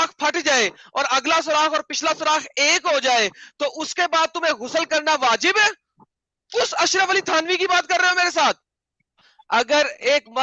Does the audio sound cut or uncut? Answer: cut